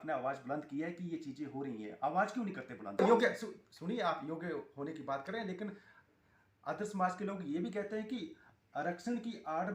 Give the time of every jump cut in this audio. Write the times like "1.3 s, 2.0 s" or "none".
3.0 s